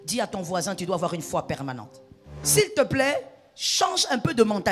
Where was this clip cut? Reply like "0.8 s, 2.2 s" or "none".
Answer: 2.4 s